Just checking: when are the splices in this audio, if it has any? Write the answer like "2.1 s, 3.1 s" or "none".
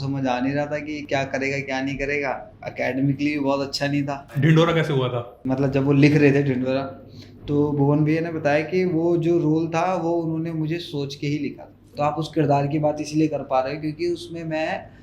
2.6 s, 4.2 s, 5.4 s, 11.8 s

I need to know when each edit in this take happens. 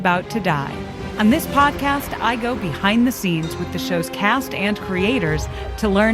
1.0 s

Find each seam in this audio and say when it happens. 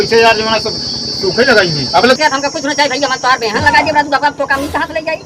none

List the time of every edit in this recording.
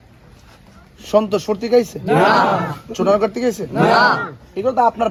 none

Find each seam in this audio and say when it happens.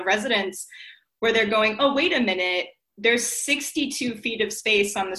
none

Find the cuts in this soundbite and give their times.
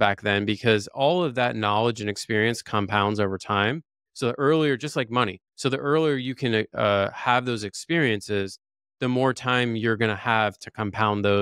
none

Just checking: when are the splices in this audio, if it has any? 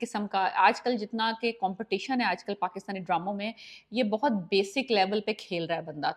none

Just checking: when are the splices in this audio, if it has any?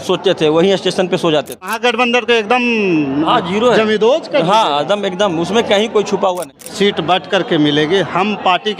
1.7 s, 6.6 s

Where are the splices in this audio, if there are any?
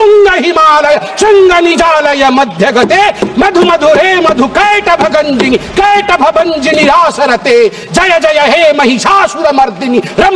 none

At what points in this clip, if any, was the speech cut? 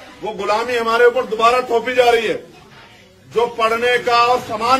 none

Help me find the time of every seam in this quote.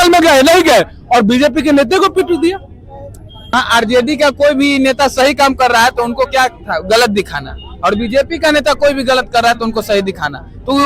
3.4 s

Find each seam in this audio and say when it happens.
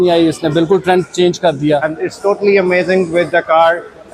1.9 s

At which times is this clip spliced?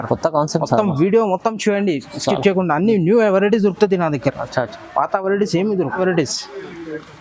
6.0 s

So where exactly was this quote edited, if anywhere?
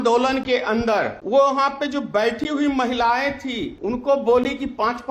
1.2 s, 3.7 s

